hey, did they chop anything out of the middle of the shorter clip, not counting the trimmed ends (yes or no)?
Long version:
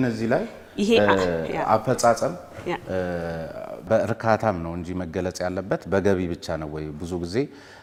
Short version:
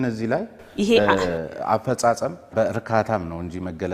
yes